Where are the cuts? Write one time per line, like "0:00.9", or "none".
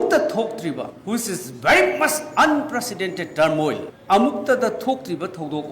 0:00.9